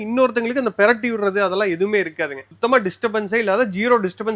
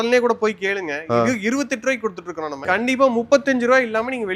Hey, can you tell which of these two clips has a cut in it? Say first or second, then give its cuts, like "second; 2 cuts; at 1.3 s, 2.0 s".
second; 1 cut; at 2.6 s